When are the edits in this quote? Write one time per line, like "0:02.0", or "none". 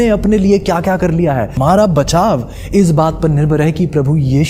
0:01.5